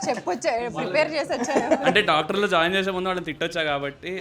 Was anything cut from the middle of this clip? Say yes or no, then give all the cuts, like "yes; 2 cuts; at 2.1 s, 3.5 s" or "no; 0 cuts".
no; 0 cuts